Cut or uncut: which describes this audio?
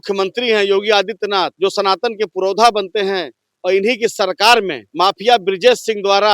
cut